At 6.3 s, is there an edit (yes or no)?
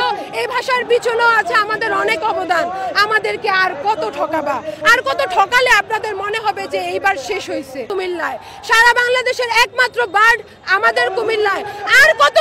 no